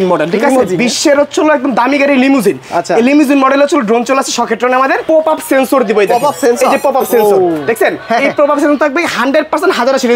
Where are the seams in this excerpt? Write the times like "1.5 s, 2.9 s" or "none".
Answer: 5.0 s